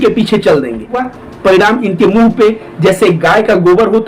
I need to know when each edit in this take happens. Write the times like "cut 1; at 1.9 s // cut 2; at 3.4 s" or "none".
cut 1; at 1.0 s